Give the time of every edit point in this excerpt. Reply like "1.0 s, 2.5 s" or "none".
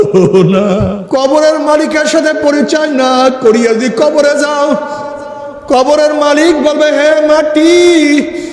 1.0 s